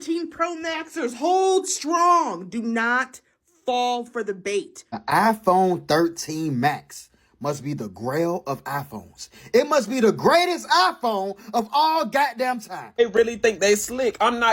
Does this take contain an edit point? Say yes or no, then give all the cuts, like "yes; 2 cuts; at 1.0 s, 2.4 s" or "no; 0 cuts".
yes; 2 cuts; at 5.0 s, 12.8 s